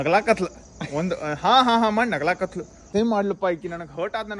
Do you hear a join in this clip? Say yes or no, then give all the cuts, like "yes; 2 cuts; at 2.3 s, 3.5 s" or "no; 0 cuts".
yes; 1 cut; at 2.8 s